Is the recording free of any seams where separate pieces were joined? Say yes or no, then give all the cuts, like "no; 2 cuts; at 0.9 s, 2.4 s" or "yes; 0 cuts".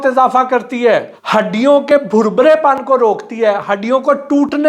no; 1 cut; at 1.2 s